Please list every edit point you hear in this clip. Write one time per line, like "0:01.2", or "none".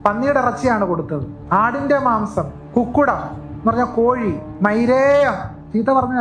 0:01.3
0:02.6
0:04.5